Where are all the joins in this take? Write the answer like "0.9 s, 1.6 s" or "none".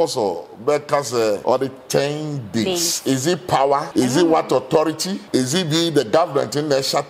1.4 s, 3.9 s, 5.2 s